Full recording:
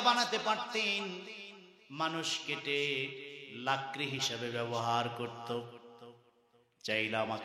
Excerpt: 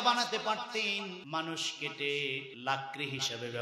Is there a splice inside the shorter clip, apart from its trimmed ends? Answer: yes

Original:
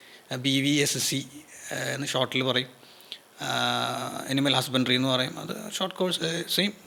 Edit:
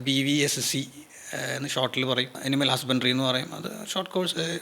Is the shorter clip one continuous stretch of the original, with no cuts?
no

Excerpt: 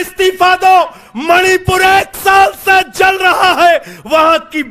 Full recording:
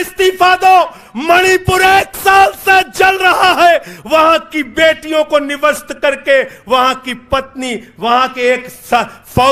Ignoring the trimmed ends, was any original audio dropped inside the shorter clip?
no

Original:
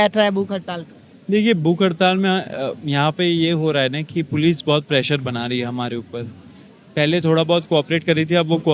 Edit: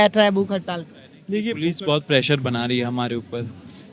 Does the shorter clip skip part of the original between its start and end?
yes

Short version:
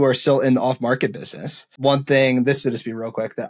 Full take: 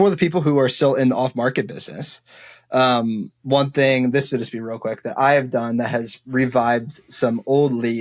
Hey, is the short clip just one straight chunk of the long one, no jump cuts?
no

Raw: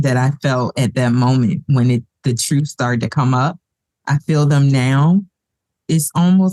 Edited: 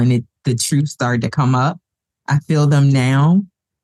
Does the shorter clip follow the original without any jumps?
yes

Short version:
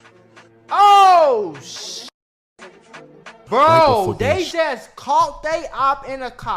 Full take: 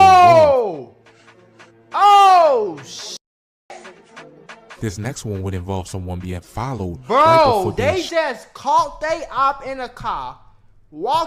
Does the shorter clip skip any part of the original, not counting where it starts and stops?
yes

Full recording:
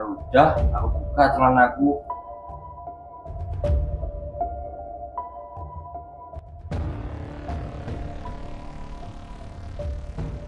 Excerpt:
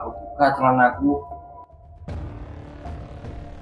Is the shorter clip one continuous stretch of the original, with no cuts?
no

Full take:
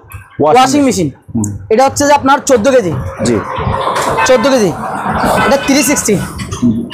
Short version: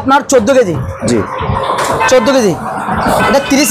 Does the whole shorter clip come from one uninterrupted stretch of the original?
yes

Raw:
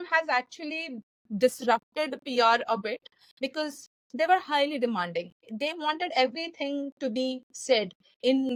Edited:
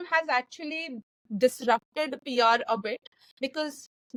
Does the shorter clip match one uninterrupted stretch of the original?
yes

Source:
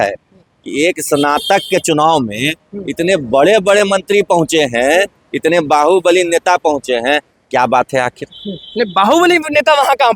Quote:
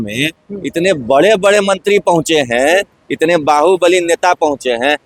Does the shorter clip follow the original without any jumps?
yes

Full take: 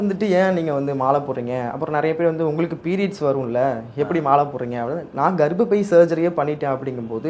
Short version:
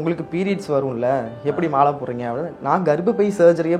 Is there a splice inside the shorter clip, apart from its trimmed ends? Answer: no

